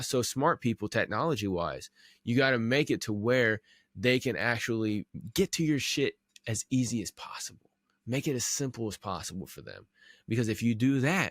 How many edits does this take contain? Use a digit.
1